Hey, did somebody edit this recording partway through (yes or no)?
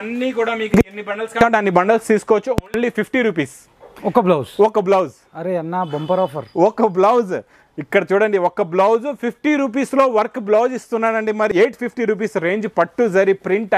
yes